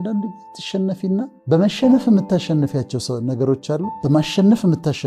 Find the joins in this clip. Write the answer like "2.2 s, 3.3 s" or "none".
1.4 s, 3.9 s